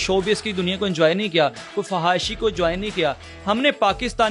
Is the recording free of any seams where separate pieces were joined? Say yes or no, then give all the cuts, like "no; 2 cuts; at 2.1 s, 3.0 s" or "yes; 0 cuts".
yes; 0 cuts